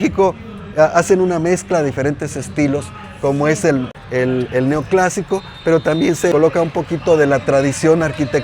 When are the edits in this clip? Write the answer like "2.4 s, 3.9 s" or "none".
3.9 s, 6.3 s